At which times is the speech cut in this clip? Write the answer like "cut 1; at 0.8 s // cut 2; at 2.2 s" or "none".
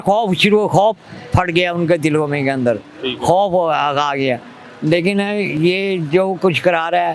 none